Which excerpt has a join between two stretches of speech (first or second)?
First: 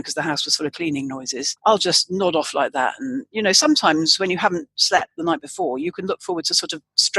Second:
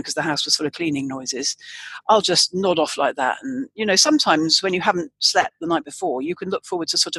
first